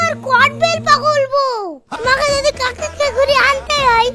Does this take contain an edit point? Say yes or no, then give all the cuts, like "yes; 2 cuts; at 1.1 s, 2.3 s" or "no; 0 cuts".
yes; 1 cut; at 1.8 s